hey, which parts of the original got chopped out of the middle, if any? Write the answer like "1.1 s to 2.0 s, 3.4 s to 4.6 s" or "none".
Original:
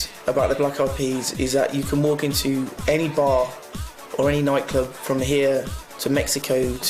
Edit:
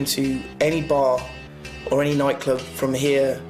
none